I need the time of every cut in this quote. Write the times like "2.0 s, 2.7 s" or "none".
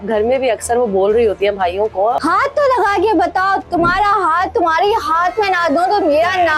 2.2 s